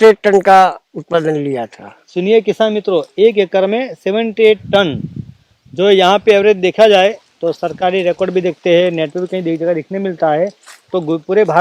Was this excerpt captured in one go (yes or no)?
yes